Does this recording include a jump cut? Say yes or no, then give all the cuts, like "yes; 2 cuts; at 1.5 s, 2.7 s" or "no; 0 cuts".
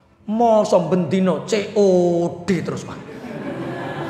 no; 0 cuts